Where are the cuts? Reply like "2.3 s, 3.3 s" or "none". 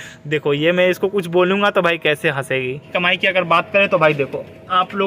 2.8 s